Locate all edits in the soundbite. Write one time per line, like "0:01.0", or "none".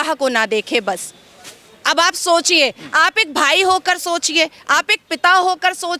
none